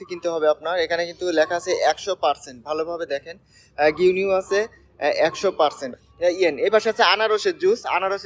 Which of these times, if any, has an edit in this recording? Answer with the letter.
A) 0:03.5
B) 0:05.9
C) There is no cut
B